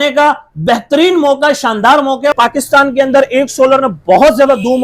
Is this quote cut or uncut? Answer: cut